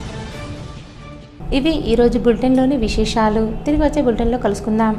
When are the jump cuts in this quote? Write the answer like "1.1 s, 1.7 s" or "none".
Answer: none